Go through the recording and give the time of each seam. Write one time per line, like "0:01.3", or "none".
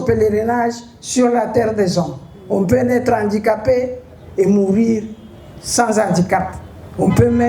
none